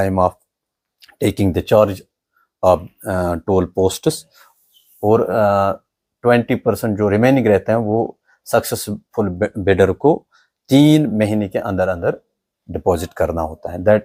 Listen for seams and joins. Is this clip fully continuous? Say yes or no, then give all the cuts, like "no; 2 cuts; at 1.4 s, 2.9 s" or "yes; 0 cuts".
yes; 0 cuts